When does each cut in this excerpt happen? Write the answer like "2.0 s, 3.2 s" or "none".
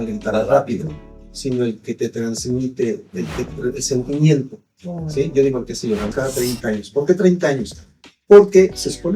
6.1 s